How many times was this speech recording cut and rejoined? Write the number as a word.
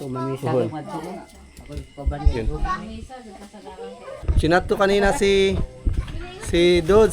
one